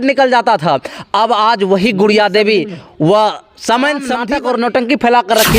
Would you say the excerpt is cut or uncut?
cut